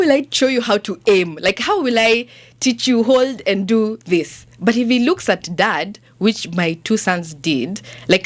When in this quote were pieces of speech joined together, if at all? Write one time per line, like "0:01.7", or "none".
none